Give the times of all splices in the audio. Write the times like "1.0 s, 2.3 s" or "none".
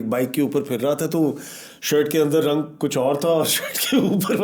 none